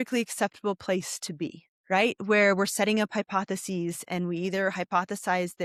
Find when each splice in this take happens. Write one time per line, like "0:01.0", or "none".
none